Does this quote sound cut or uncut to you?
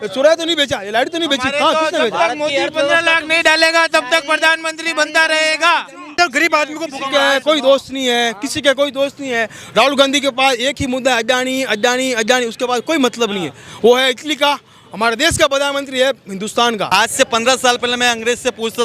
cut